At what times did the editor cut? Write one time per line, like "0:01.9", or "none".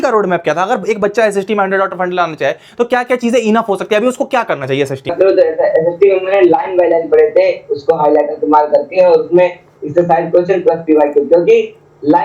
0:05.1